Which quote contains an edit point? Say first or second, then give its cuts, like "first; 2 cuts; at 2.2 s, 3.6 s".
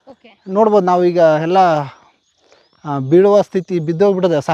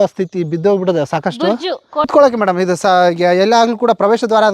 second; 1 cut; at 2.1 s